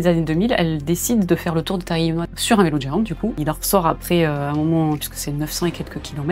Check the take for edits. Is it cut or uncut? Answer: cut